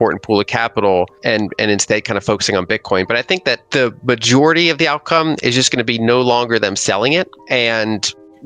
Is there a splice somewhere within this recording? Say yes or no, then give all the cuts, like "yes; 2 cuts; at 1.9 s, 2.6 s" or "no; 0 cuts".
yes; 3 cuts; at 1.2 s, 3.6 s, 7.4 s